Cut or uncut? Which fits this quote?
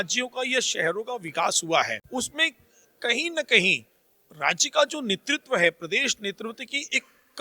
cut